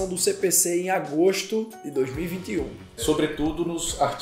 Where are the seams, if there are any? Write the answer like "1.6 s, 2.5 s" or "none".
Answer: 3.0 s